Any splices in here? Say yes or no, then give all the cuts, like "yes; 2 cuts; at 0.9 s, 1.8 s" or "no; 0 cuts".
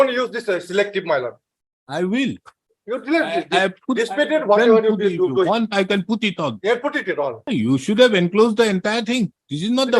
yes; 1 cut; at 7.4 s